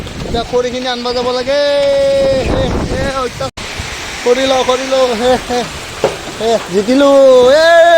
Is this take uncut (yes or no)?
no